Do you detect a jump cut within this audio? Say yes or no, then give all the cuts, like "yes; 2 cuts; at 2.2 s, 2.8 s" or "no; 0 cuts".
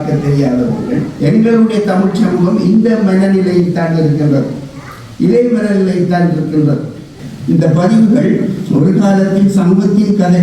yes; 2 cuts; at 1.1 s, 7.1 s